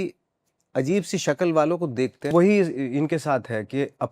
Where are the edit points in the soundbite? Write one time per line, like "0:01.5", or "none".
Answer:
0:02.3